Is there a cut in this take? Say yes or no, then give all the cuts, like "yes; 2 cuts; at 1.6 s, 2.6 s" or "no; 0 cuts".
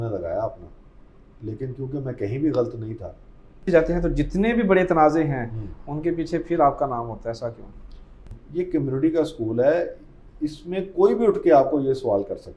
yes; 2 cuts; at 3.7 s, 8.4 s